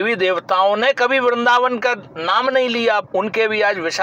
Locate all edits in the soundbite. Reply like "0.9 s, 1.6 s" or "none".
3.1 s